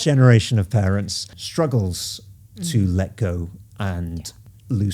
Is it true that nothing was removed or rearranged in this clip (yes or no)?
no